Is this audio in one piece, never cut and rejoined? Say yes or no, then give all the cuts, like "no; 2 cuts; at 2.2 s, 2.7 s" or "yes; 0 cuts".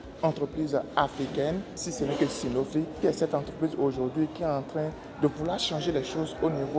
no; 2 cuts; at 1.8 s, 2.9 s